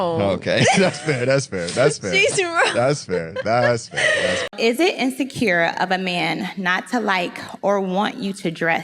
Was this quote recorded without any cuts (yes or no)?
no